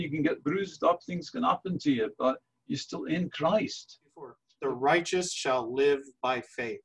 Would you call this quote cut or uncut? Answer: cut